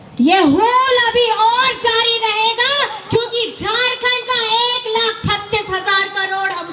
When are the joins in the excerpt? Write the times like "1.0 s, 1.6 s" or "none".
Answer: none